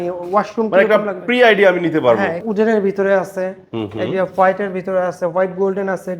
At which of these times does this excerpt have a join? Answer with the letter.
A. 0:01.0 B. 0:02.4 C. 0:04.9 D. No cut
B